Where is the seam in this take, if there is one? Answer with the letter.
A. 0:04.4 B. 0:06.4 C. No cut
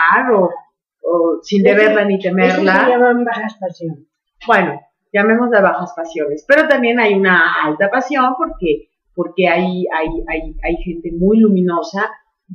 B